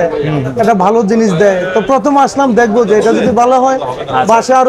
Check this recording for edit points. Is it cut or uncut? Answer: uncut